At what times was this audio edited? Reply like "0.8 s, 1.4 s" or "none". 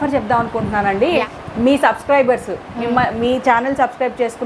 1.3 s